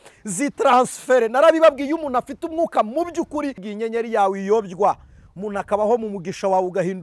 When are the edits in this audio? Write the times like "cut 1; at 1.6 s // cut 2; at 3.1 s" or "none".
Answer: cut 1; at 3.6 s